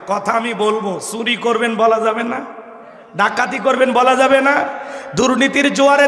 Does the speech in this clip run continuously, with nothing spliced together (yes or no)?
yes